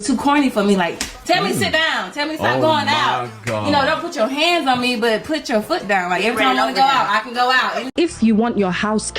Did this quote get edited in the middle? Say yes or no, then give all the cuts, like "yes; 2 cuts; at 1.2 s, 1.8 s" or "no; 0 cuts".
yes; 1 cut; at 7.9 s